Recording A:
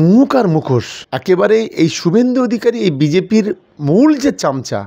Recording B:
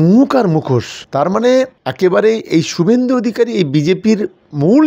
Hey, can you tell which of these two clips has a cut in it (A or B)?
A